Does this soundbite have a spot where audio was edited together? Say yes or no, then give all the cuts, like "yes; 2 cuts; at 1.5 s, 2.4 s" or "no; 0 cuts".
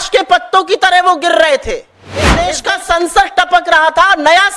yes; 1 cut; at 2.4 s